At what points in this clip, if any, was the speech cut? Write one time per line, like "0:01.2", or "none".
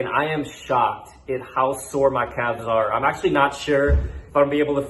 none